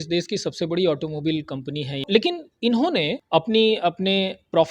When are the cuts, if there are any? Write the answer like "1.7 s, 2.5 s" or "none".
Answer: 2.0 s, 3.2 s